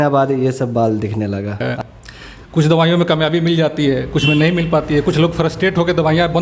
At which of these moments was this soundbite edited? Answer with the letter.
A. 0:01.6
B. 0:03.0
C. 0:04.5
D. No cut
A